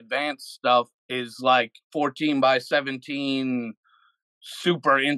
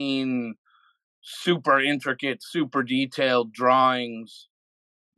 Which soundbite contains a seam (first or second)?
first